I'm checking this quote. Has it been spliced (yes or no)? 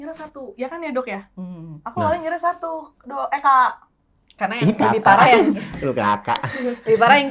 no